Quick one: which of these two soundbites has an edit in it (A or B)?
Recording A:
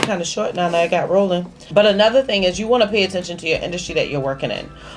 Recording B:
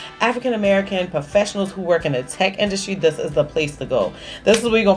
A